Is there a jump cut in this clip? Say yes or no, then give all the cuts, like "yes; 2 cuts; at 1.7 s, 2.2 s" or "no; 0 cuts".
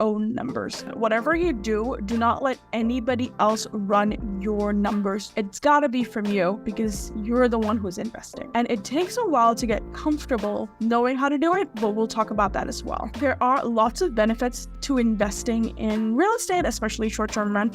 yes; 1 cut; at 0.9 s